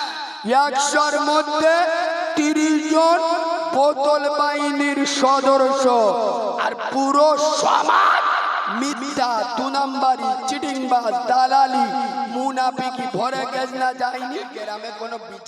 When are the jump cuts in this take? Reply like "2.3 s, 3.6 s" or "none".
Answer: 14.5 s